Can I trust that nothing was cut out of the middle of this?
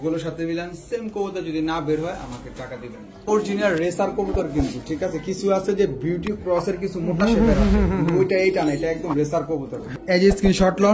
no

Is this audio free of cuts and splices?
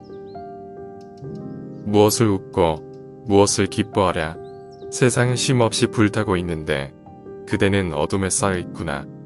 no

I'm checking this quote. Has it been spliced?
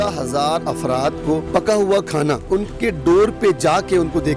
yes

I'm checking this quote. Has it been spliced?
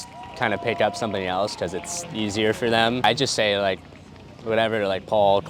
yes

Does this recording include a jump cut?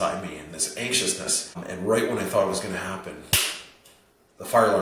yes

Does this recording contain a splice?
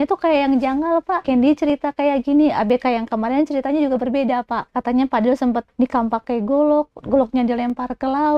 yes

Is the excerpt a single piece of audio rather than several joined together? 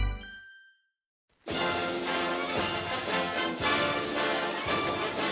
no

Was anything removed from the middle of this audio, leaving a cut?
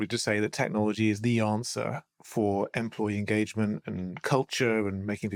no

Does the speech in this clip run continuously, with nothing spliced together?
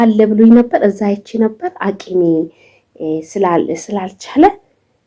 yes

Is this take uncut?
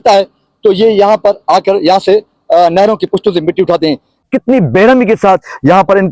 no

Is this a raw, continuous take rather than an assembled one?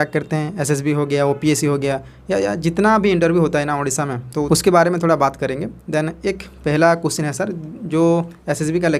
yes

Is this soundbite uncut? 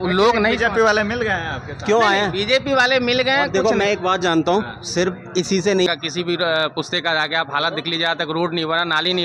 no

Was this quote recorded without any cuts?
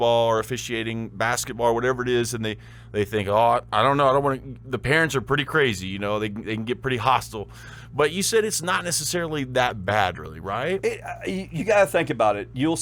yes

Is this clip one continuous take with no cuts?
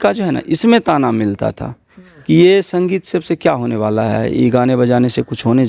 yes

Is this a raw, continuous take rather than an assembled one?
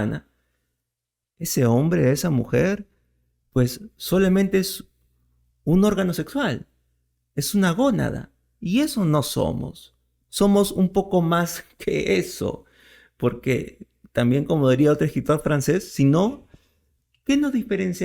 yes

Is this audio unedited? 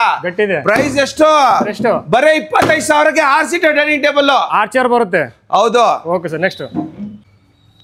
yes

